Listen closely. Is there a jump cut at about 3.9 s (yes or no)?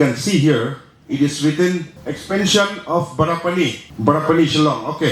yes